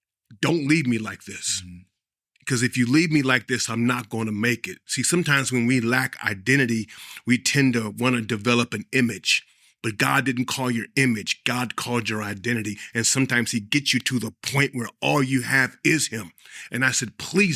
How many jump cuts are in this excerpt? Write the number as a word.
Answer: zero